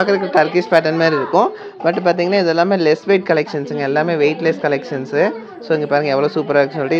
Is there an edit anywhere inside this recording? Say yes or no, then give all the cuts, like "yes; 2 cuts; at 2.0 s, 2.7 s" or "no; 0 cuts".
no; 0 cuts